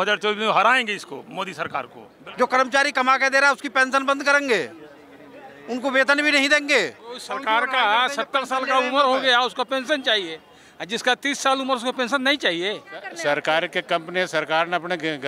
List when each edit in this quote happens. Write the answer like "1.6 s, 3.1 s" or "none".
2.1 s, 7.3 s, 13.1 s